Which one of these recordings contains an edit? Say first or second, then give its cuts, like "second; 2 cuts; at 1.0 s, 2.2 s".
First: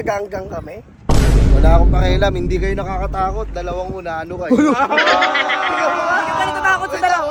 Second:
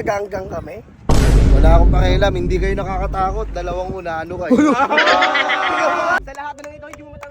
second; 1 cut; at 6.2 s